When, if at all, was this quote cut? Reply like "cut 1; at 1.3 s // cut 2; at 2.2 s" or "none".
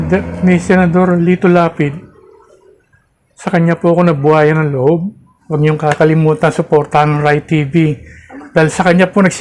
cut 1; at 5.4 s